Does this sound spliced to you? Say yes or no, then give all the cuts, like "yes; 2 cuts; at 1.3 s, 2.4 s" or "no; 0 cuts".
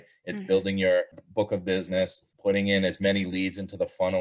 yes; 2 cuts; at 1.2 s, 2.3 s